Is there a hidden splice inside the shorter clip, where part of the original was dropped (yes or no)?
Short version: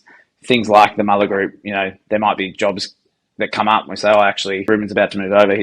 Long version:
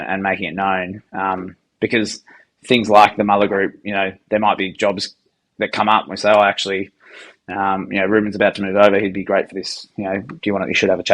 yes